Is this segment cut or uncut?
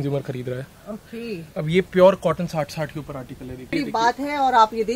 cut